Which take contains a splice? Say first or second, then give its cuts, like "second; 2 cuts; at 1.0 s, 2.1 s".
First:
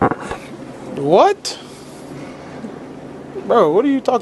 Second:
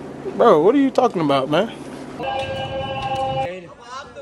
second; 2 cuts; at 2.2 s, 3.5 s